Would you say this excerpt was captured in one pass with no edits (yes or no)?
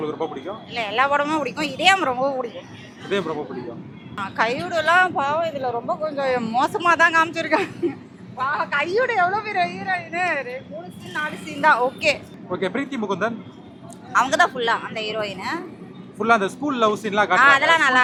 yes